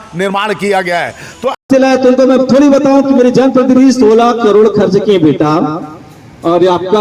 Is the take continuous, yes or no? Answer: no